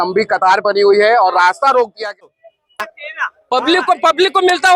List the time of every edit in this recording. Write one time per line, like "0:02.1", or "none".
0:02.2